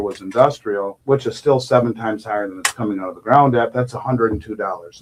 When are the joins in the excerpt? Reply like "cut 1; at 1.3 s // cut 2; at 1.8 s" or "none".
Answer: none